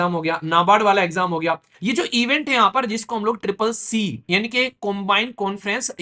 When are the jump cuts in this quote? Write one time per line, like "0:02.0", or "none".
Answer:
0:01.7